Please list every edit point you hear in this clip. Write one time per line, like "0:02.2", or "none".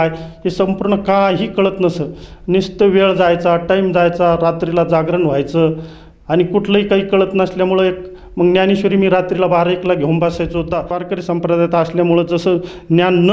0:11.0